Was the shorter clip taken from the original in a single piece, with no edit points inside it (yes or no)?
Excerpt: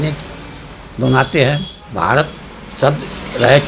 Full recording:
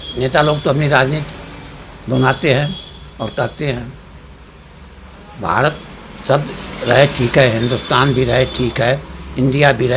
no